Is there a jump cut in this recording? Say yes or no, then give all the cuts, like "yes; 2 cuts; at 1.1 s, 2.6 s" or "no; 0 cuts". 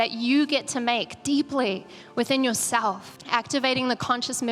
yes; 1 cut; at 3.1 s